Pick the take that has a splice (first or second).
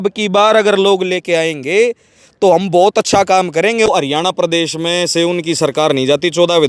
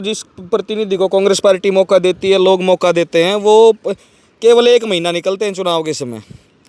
first